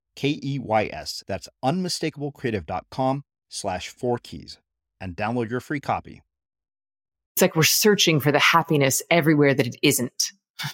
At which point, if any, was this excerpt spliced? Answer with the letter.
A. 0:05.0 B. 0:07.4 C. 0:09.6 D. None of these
B